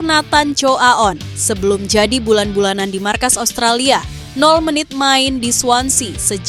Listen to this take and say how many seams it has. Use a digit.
0